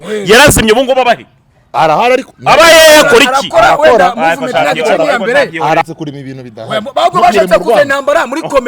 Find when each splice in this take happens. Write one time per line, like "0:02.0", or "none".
0:05.8